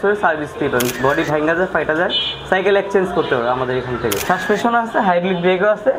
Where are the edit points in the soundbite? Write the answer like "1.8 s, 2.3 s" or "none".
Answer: 4.2 s